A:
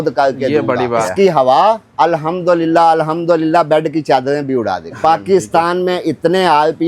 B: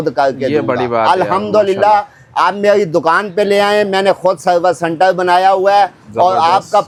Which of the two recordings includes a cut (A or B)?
A